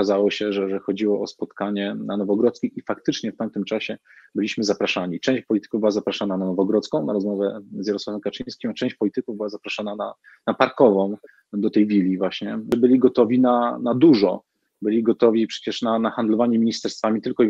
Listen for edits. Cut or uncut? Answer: cut